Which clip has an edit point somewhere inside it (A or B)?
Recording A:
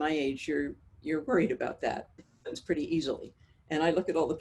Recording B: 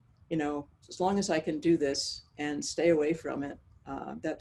A